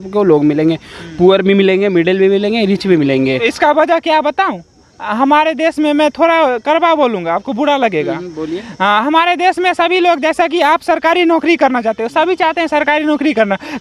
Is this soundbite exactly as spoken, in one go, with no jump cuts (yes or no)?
yes